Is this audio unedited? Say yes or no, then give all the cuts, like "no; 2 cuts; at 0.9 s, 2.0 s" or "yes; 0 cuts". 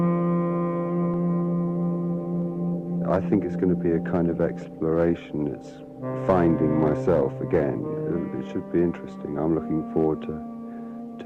yes; 0 cuts